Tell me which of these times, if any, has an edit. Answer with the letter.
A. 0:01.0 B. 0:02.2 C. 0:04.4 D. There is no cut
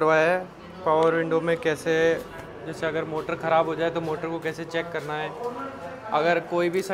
D